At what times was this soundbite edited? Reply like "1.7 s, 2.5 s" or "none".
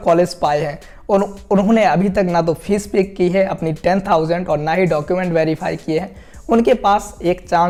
none